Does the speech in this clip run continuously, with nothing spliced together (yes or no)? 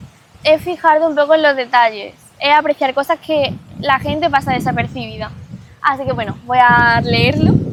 yes